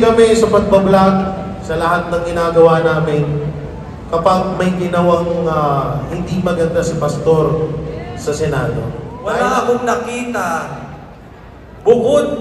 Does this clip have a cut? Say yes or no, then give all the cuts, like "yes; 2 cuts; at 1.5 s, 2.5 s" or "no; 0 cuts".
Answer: yes; 1 cut; at 9.1 s